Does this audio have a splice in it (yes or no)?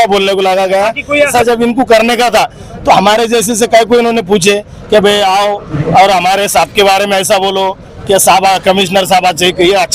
yes